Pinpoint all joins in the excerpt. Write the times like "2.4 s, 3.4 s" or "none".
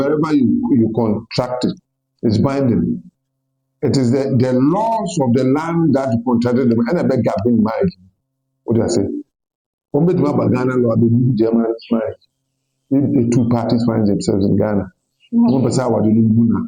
none